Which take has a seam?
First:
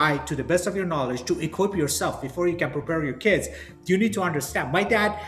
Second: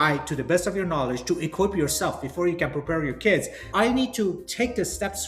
second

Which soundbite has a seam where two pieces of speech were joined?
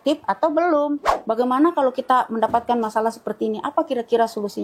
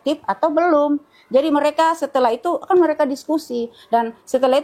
first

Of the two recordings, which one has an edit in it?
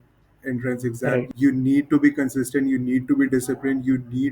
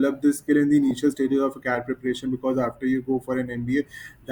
first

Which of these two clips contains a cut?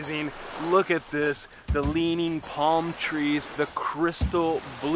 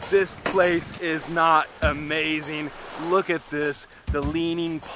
first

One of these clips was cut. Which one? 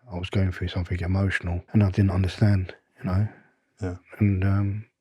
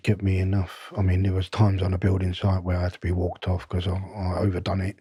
first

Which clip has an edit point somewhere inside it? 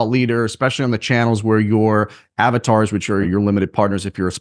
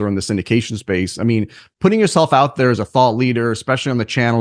first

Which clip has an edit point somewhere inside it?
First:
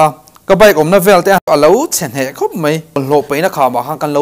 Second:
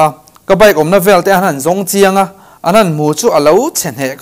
first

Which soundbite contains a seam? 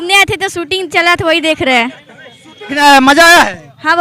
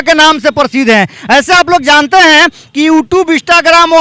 first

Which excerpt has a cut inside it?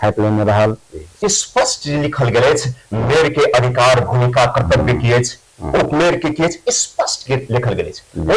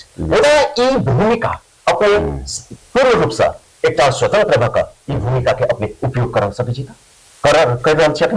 first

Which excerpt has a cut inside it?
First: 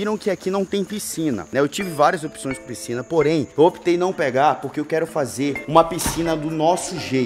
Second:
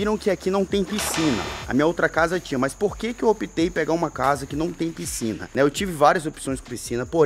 first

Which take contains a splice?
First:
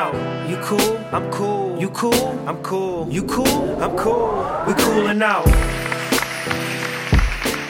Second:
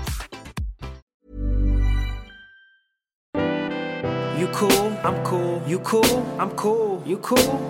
second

